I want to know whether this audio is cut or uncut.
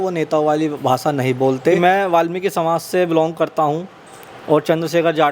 cut